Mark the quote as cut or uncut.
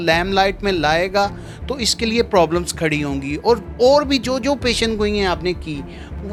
uncut